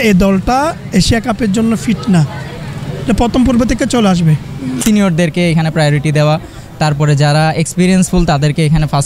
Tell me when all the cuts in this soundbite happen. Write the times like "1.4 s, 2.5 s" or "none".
none